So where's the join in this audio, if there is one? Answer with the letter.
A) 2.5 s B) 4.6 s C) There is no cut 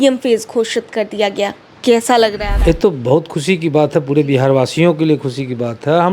A